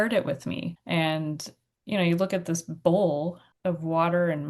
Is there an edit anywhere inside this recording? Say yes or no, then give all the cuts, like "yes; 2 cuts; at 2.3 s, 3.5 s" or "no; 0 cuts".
yes; 2 cuts; at 0.8 s, 3.5 s